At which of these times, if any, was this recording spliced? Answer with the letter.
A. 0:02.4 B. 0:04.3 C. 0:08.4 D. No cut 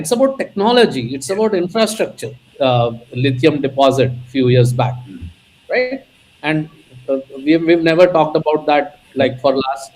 A